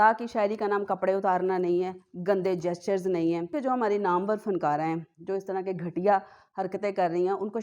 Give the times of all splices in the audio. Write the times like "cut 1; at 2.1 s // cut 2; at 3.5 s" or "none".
cut 1; at 3.5 s